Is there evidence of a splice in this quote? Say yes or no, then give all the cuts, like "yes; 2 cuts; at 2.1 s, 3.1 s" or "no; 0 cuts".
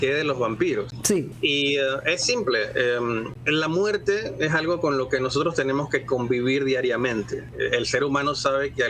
yes; 3 cuts; at 1.1 s, 3.3 s, 7.4 s